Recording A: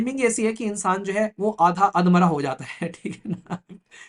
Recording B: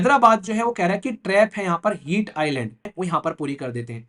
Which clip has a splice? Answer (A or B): B